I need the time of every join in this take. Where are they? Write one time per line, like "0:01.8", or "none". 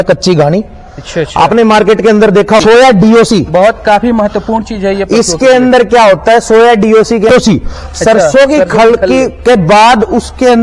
0:02.6
0:07.3